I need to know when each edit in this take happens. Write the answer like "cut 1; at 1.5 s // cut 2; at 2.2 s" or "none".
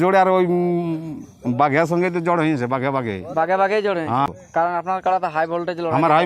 cut 1; at 4.3 s